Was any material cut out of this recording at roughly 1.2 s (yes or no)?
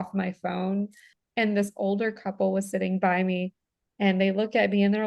yes